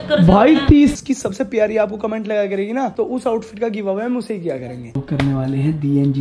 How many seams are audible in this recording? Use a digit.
2